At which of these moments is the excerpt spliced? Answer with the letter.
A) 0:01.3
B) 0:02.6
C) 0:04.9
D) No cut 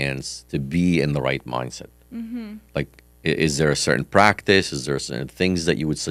D